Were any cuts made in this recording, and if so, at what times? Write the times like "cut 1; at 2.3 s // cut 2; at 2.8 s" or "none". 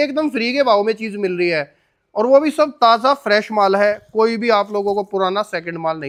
none